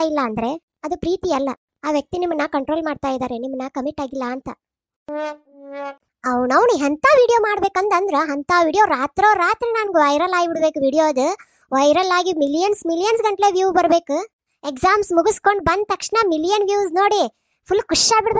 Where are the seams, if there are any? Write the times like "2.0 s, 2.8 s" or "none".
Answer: 6.0 s